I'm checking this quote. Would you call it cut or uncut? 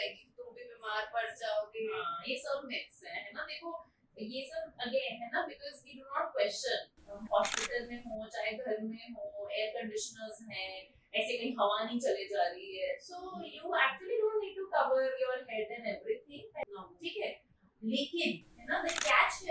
cut